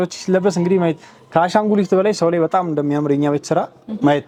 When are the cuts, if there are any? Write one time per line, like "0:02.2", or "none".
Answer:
none